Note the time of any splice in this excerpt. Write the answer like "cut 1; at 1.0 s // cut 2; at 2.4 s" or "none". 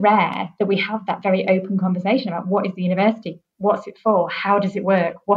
none